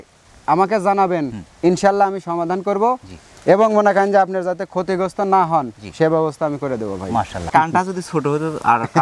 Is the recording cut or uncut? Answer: cut